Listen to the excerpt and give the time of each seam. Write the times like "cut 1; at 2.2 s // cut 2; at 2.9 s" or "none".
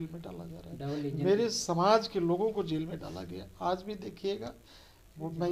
none